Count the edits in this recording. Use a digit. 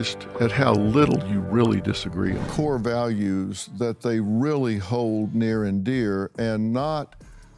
1